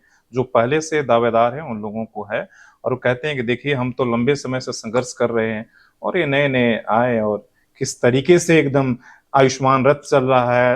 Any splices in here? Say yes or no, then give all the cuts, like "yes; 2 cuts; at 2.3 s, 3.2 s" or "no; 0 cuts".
no; 0 cuts